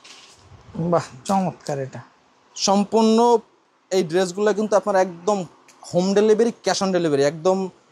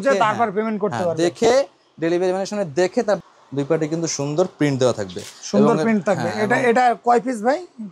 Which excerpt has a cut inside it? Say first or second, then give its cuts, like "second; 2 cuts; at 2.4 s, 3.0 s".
second; 1 cut; at 3.2 s